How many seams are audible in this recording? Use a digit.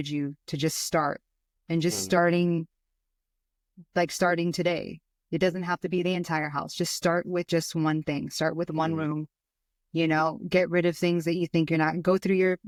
0